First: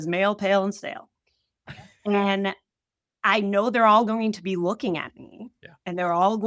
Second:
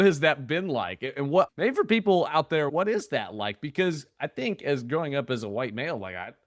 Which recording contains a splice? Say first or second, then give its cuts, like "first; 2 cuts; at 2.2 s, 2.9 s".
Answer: second; 2 cuts; at 1.5 s, 2.7 s